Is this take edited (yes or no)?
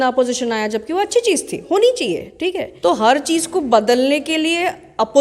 yes